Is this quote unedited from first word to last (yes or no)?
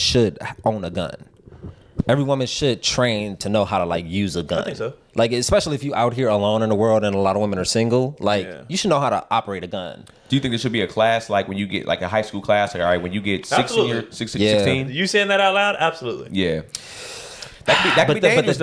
yes